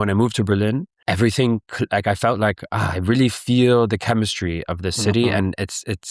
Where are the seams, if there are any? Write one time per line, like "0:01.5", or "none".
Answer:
0:00.9